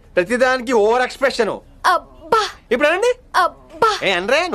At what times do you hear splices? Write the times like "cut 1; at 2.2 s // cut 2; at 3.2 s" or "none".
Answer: none